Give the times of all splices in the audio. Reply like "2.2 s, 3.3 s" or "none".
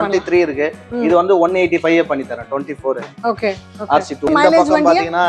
4.3 s